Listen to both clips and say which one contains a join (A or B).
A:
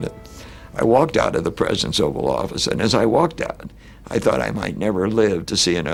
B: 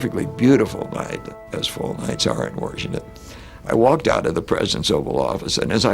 B